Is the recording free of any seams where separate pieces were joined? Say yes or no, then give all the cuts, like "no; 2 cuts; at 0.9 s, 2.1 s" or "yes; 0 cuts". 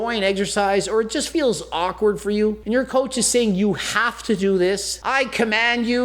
no; 2 cuts; at 2.6 s, 4.9 s